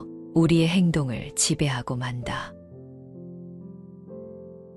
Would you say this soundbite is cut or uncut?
uncut